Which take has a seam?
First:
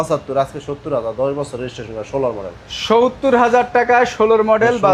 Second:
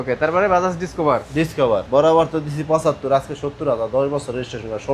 second; 1 cut; at 1.8 s

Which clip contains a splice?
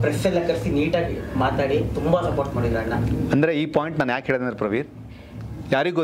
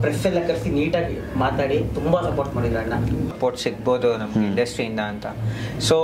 second; 1 cut; at 3.3 s

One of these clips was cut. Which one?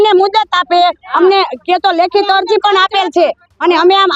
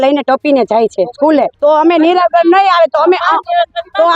second; 1 cut; at 1.5 s

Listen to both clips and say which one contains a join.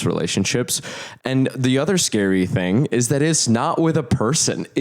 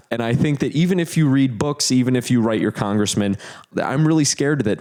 first; 1 cut; at 1.0 s

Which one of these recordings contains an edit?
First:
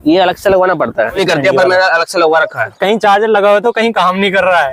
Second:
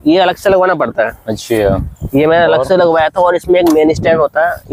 first; 2 cuts; at 1.2 s, 2.8 s

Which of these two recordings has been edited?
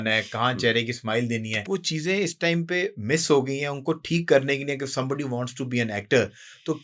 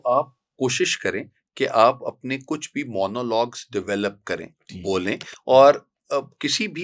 first; 1 cut; at 1.5 s

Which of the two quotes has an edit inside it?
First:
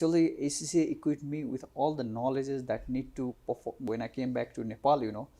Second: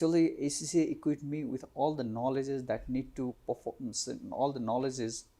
first; 1 cut; at 3.9 s

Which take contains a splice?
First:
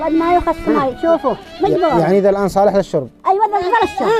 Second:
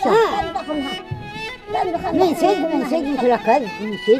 first; 1 cut; at 1.5 s

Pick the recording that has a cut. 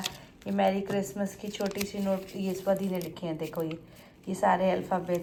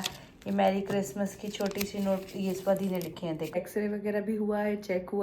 second; 1 cut; at 3.6 s

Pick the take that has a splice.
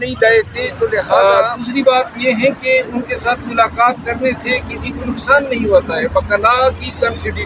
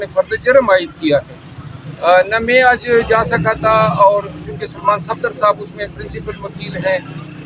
first; 1 cut; at 1.1 s

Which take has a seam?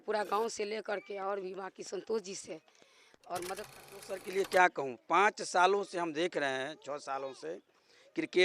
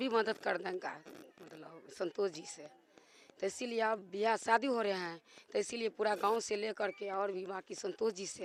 first; 1 cut; at 4.2 s

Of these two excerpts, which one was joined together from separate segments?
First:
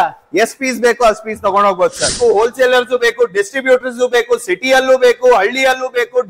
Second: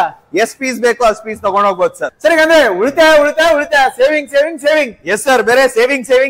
first; 1 cut; at 2.1 s

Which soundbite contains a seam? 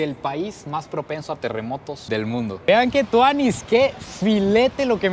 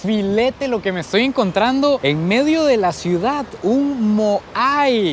first; 1 cut; at 2.6 s

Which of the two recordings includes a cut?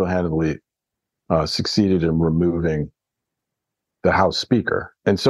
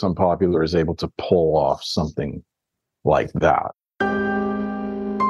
second; 1 cut; at 3.8 s

